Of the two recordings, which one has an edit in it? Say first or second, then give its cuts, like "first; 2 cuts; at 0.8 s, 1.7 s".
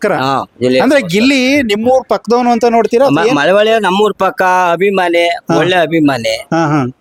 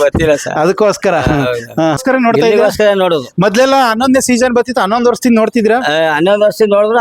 second; 1 cut; at 2.0 s